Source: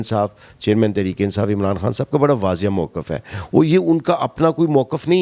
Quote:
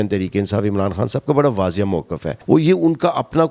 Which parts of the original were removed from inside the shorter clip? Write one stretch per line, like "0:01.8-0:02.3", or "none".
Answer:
0:03.1-0:03.3